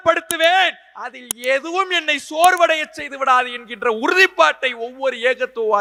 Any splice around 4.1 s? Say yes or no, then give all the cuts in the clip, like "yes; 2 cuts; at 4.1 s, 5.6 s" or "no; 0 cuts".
no; 0 cuts